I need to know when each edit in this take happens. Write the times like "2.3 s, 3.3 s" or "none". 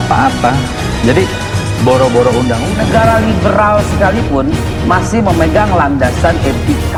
none